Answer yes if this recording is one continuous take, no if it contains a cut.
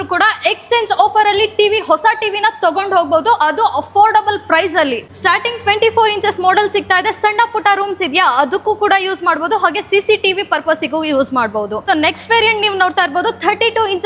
yes